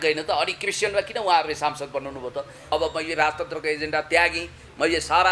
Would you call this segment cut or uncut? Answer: cut